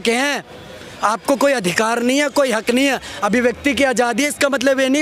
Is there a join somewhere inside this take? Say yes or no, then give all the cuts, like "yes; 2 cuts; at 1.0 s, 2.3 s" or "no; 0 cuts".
no; 0 cuts